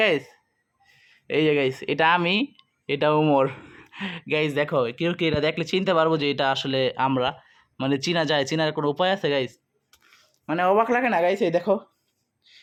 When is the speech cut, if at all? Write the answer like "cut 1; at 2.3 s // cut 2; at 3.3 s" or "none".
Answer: none